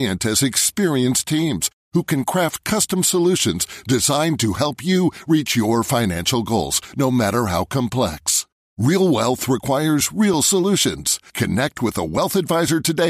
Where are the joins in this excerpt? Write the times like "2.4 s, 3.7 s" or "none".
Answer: none